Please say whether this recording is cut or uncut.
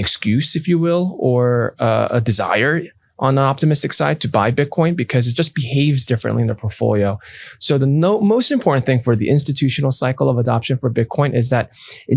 uncut